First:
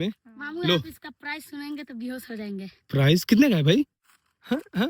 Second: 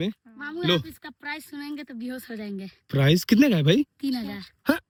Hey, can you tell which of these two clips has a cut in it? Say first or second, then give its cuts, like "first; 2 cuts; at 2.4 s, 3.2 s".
first; 1 cut; at 3.9 s